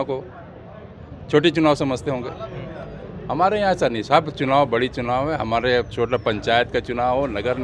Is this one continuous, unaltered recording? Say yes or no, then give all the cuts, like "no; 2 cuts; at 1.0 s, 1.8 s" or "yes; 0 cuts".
yes; 0 cuts